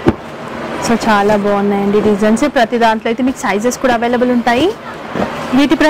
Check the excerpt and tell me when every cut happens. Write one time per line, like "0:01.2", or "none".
none